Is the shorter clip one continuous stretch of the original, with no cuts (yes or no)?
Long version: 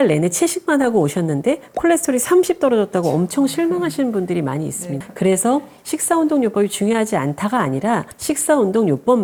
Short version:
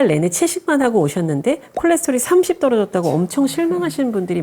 yes